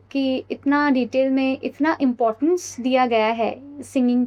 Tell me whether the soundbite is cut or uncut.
uncut